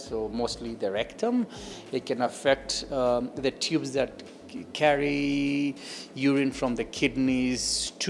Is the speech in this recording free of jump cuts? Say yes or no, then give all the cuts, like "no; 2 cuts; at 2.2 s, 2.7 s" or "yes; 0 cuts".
yes; 0 cuts